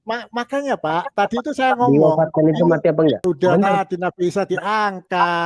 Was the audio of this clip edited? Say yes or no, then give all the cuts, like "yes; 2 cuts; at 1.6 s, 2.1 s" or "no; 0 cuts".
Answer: yes; 1 cut; at 3.2 s